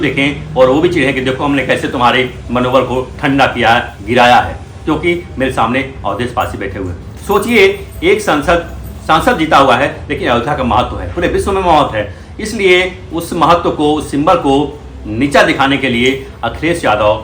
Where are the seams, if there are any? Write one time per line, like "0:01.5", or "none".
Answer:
none